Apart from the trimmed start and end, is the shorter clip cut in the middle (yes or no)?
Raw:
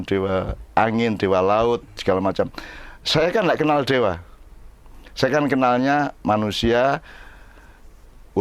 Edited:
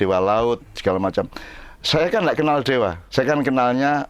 yes